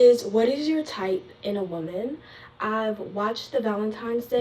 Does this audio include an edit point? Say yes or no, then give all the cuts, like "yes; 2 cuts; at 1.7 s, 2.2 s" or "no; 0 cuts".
no; 0 cuts